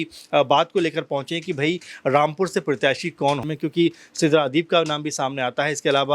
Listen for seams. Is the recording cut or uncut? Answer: cut